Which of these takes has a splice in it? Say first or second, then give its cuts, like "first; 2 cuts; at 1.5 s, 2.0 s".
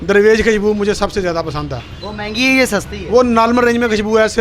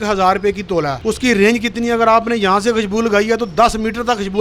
second; 1 cut; at 0.9 s